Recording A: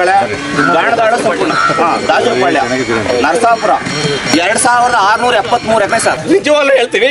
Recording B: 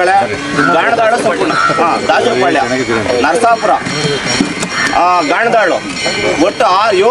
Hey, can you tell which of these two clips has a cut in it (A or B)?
A